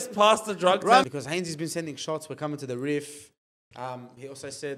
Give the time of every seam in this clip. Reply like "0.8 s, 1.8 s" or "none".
1.1 s